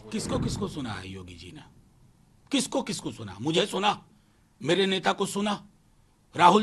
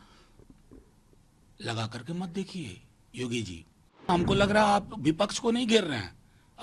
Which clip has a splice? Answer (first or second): second